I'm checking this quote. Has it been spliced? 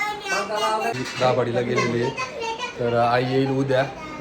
yes; 1 cut; at 1.0 s

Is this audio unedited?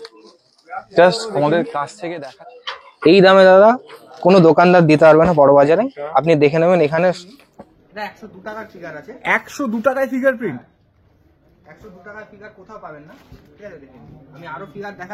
no; 2 cuts; at 2.0 s, 7.4 s

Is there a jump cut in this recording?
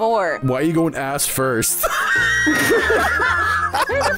no; 0 cuts

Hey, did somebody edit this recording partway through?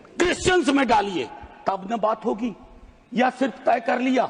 no; 0 cuts

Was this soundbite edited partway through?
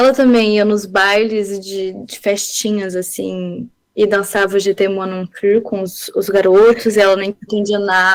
no; 0 cuts

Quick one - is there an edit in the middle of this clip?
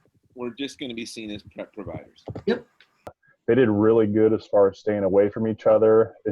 yes; 1 cut; at 3.3 s

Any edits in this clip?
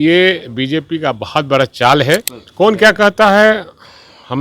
yes; 1 cut; at 2.4 s

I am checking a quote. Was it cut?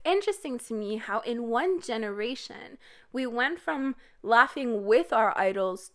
no; 0 cuts

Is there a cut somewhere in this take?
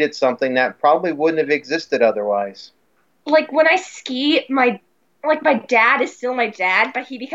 no; 0 cuts

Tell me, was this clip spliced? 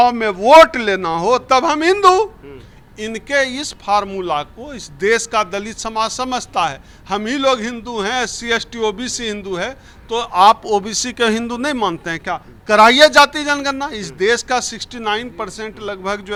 no; 0 cuts

